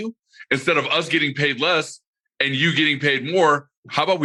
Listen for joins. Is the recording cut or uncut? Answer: uncut